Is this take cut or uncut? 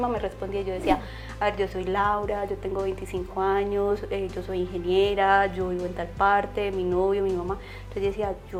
uncut